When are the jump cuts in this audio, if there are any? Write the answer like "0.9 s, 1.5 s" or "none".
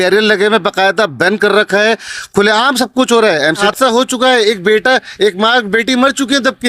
3.6 s